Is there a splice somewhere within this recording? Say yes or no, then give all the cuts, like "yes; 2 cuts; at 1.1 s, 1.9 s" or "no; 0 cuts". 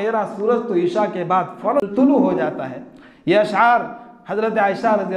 yes; 1 cut; at 1.8 s